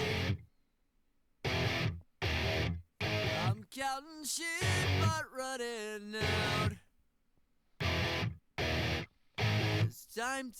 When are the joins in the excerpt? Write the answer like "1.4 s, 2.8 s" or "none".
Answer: 6.0 s